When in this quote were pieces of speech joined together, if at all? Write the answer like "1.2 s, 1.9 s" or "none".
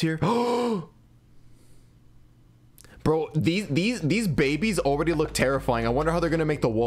none